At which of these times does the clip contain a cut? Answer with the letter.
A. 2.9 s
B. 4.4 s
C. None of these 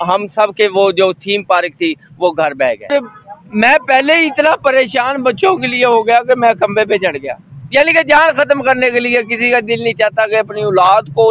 A